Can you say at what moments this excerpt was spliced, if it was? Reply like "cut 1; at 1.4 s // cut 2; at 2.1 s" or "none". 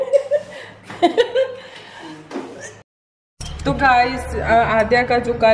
cut 1; at 2.6 s